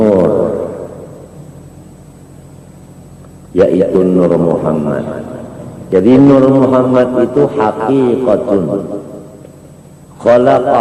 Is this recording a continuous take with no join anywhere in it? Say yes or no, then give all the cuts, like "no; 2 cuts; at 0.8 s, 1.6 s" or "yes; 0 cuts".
no; 1 cut; at 5.8 s